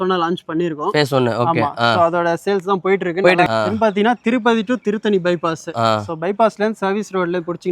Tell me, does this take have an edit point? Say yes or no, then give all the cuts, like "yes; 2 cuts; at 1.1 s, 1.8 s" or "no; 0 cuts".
yes; 1 cut; at 3.5 s